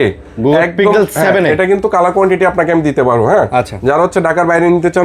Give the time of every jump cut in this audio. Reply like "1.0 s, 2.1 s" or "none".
none